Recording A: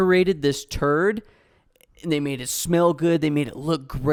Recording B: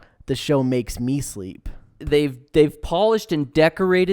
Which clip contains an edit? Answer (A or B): B